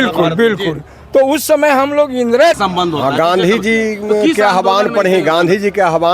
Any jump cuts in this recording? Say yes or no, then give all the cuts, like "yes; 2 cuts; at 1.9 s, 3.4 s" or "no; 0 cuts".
yes; 1 cut; at 2.6 s